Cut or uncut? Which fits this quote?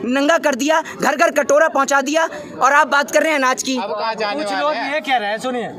uncut